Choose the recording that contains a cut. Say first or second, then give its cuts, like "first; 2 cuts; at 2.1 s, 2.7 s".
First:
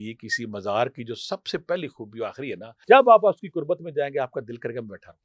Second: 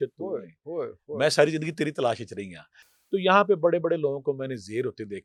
first; 1 cut; at 2.7 s